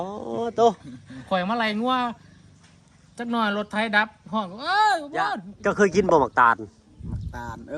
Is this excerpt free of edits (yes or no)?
no